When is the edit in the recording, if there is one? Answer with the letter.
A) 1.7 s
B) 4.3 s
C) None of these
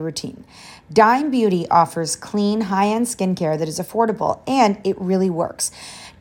C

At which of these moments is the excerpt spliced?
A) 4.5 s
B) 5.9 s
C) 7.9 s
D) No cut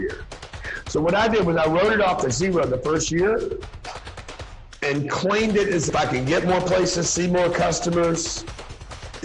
B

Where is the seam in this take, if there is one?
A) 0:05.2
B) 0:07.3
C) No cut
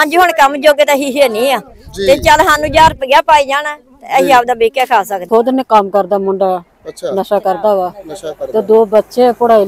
A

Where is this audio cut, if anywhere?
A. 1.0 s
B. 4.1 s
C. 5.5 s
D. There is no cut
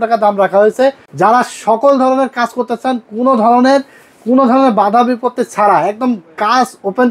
A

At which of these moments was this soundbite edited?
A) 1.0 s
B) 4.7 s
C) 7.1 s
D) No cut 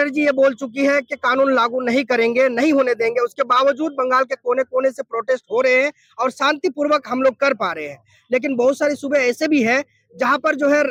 D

